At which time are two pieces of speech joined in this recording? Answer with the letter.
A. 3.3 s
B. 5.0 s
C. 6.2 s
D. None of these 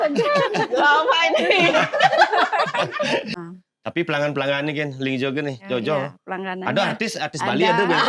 A